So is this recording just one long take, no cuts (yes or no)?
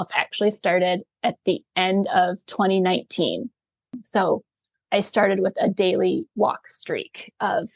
no